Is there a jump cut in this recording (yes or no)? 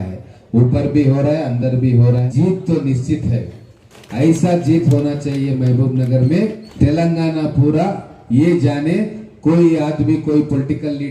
yes